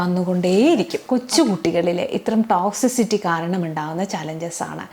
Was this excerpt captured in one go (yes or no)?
no